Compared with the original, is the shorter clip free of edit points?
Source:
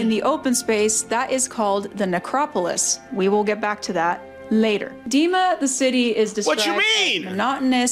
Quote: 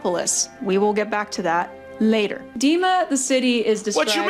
yes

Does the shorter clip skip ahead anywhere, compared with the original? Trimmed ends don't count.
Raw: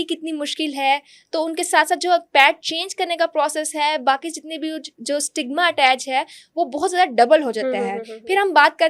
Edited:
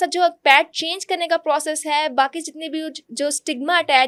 no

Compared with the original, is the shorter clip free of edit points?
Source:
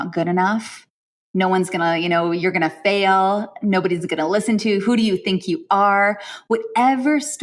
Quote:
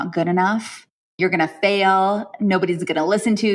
no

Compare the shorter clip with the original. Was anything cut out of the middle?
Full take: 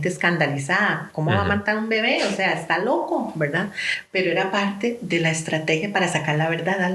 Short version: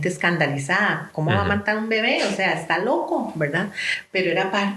no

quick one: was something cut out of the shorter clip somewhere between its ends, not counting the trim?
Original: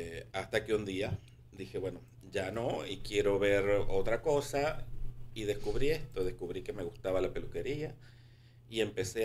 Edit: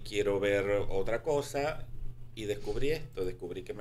no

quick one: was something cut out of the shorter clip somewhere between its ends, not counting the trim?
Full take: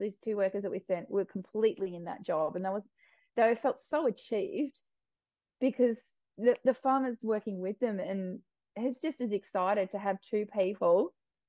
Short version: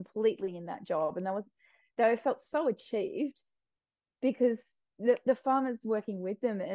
no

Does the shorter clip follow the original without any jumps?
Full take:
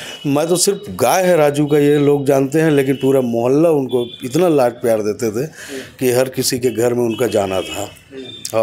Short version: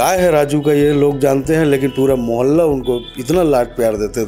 yes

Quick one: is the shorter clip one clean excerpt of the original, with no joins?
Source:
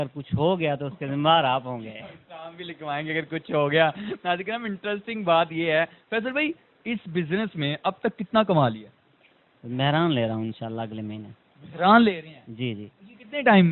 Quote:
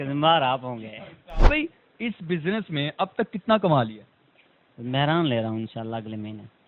no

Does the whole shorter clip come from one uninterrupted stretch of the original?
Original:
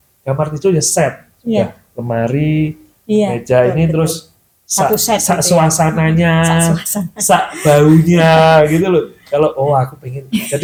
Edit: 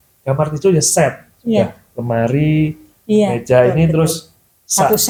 yes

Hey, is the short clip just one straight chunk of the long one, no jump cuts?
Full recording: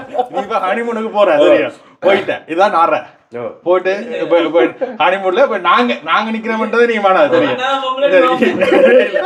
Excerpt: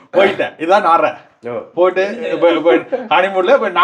yes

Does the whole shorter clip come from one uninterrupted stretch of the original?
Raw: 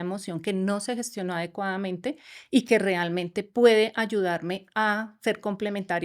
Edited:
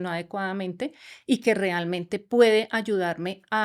yes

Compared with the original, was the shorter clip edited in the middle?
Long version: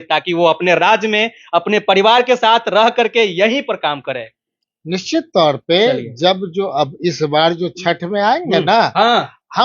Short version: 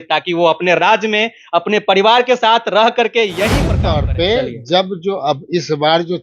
yes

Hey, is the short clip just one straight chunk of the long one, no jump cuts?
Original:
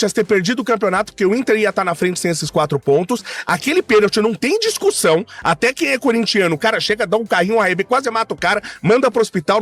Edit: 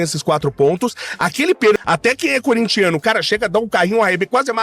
no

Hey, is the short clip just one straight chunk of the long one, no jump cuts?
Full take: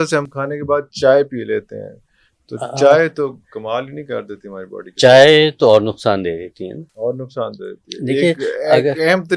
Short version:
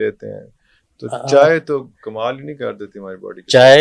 yes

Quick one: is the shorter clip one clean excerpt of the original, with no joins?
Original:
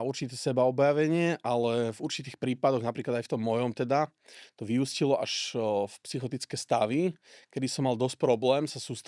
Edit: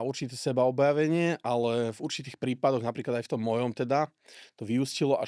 yes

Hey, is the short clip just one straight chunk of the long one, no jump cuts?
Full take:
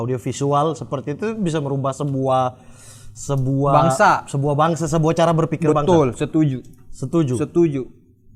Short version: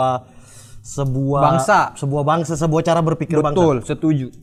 yes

